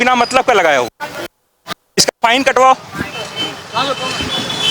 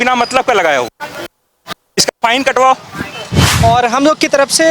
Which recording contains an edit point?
second; 1 cut; at 3.4 s

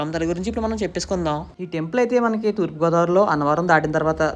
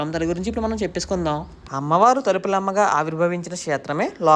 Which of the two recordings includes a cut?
first; 1 cut; at 1.6 s

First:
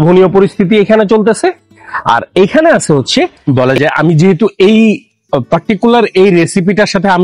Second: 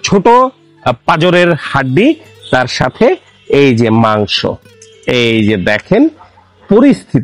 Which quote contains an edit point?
first; 1 cut; at 3.4 s

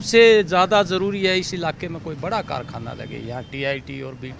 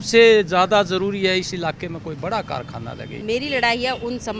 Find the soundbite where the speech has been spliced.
second; 1 cut; at 3.2 s

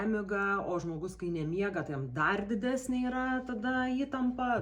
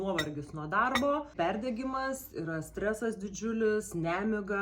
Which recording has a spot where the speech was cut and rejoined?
second; 1 cut; at 1.3 s

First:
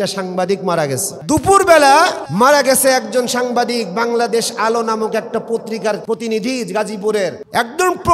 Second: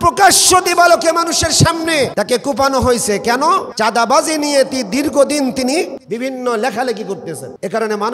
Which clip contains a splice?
second; 2 cuts; at 2.1 s, 3.7 s

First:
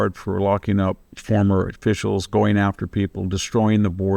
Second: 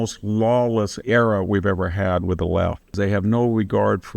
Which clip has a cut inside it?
second; 2 cuts; at 0.9 s, 3.0 s

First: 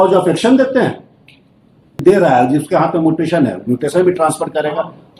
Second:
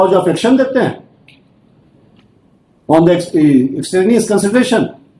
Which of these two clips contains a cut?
first; 1 cut; at 2.0 s

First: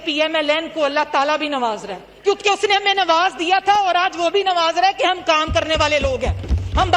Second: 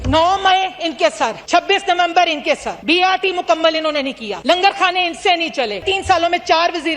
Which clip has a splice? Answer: second; 4 cuts; at 1.4 s, 2.7 s, 4.3 s, 5.8 s

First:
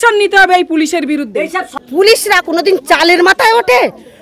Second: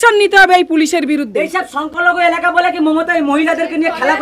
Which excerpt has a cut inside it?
first; 1 cut; at 1.8 s

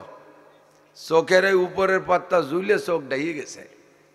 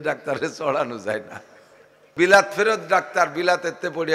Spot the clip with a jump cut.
second; 1 cut; at 2.1 s

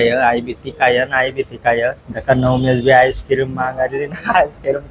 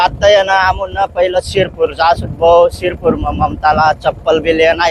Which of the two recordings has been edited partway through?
first; 1 cut; at 2.1 s

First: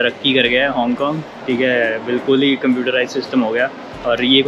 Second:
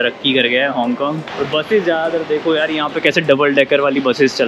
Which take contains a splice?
second; 1 cut; at 1.2 s

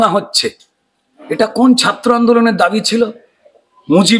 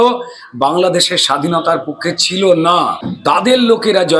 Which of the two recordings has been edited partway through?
second; 1 cut; at 3.0 s

